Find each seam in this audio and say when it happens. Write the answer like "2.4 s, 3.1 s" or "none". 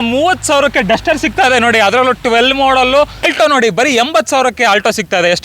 3.3 s